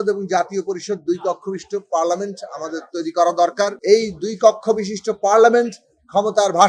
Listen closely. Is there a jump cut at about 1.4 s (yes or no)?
no